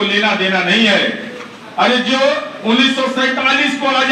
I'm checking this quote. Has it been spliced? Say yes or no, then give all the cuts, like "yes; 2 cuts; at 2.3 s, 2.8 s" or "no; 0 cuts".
no; 0 cuts